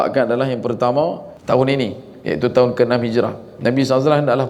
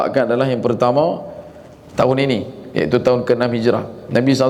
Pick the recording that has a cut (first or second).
first